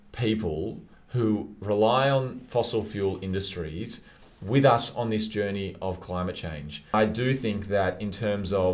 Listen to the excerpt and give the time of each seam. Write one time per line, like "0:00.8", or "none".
0:06.9